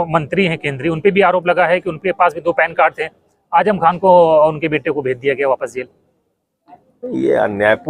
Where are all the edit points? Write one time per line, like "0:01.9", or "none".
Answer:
none